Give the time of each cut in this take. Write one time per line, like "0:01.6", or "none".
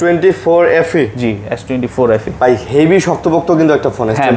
none